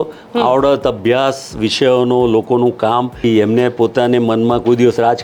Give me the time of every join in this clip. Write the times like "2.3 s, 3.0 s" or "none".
3.2 s